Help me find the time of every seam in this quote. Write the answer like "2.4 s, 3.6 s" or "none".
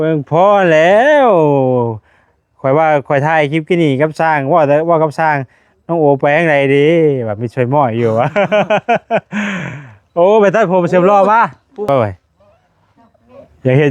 11.9 s